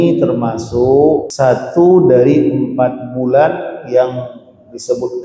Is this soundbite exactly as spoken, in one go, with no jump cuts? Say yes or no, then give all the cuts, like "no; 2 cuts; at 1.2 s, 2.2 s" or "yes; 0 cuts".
no; 1 cut; at 1.3 s